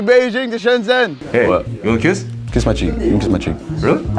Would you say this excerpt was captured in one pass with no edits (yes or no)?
no